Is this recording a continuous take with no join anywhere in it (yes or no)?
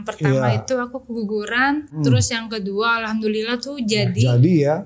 no